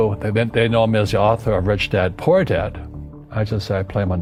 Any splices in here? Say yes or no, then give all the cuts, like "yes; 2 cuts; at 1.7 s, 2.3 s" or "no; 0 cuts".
no; 0 cuts